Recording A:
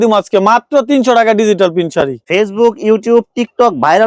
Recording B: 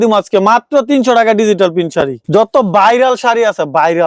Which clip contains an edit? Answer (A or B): A